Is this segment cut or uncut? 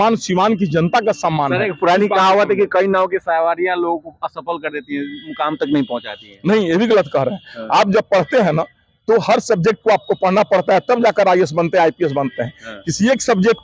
uncut